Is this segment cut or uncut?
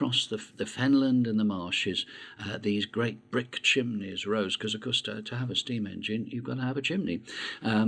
cut